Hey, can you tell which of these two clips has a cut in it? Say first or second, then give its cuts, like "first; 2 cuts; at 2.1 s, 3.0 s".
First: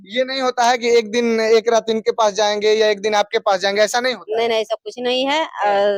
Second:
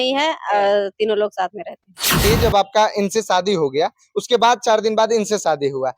second; 1 cut; at 2.2 s